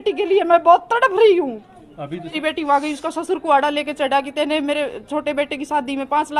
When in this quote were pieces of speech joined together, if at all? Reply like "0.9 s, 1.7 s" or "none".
2.3 s